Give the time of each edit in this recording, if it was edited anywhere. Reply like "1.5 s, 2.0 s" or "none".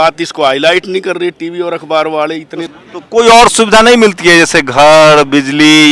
2.7 s